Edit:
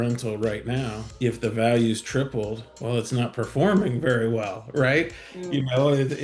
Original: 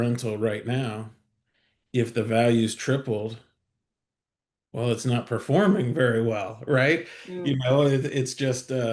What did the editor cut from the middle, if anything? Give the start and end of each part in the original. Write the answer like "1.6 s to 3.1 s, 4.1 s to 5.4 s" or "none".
1.0 s to 1.8 s, 3.4 s to 4.6 s